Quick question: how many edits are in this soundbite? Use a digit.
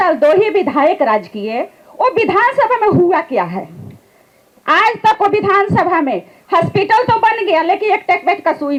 0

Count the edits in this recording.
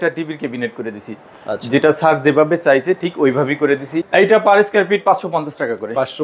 1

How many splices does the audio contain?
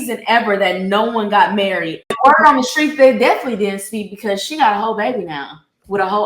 1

